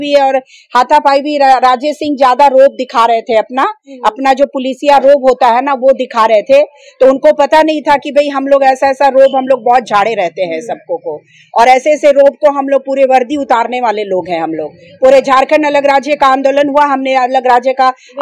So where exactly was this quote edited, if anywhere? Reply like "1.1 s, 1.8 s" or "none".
none

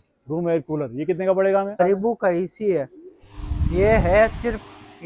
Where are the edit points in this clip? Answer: 1.8 s

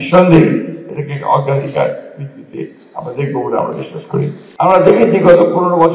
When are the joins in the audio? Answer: 4.4 s

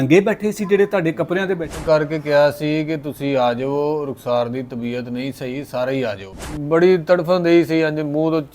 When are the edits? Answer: 1.8 s, 6.5 s

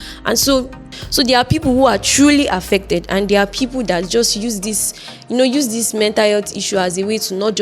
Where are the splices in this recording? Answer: 1.0 s

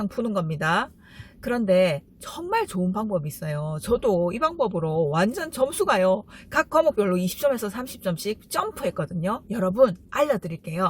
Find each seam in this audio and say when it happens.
9.4 s

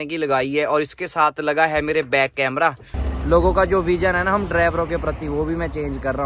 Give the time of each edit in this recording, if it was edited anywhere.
2.9 s

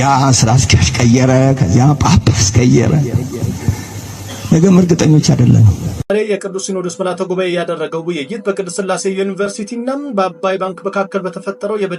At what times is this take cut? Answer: 6.0 s

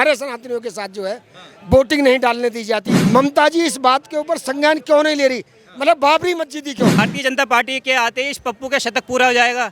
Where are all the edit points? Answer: 2.9 s, 7.0 s

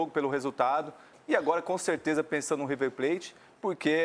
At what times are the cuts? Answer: 1.1 s

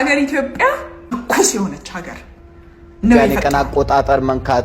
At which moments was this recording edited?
3.3 s

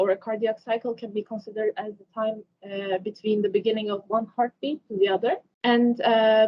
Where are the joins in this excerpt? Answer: 5.5 s

